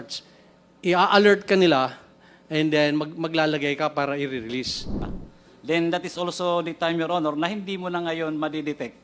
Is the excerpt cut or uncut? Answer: cut